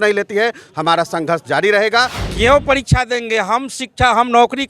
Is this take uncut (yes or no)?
no